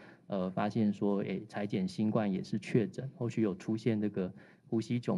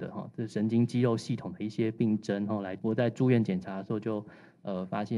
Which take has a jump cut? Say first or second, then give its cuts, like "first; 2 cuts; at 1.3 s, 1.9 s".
second; 1 cut; at 2.7 s